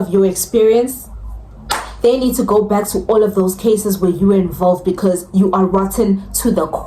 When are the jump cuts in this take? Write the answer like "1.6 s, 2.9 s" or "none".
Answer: none